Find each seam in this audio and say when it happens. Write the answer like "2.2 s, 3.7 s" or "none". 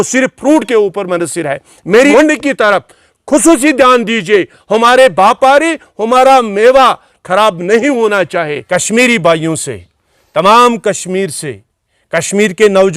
2.1 s, 8.6 s